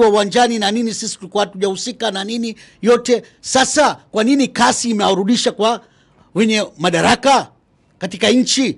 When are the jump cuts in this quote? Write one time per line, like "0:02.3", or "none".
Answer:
none